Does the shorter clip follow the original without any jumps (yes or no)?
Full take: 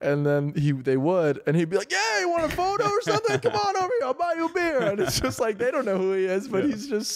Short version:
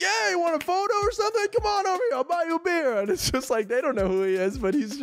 yes